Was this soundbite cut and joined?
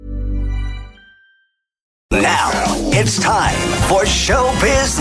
yes; 1 cut; at 2.1 s

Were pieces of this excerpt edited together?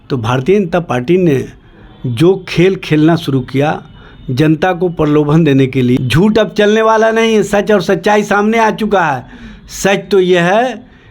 yes; 1 cut; at 6.0 s

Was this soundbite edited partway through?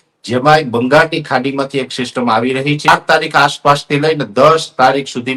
yes; 1 cut; at 2.9 s

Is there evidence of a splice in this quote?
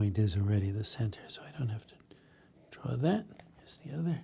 no; 0 cuts

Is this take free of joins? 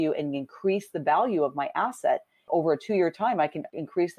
yes; 0 cuts

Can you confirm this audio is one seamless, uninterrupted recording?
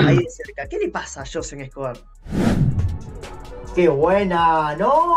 yes; 0 cuts

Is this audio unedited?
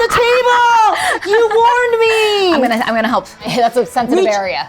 no; 1 cut; at 3.5 s

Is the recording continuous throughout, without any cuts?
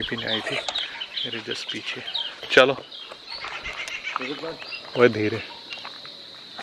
yes; 0 cuts

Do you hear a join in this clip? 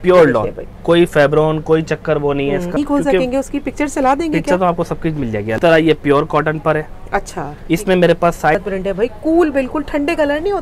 yes; 3 cuts; at 2.7 s, 5.6 s, 8.5 s

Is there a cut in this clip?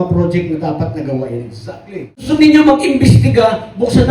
yes; 1 cut; at 2.3 s

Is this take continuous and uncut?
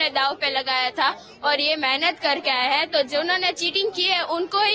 yes; 0 cuts

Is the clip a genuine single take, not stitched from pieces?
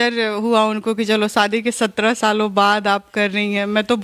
yes; 0 cuts

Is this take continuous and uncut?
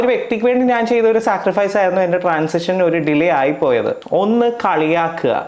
no; 1 cut; at 4.0 s

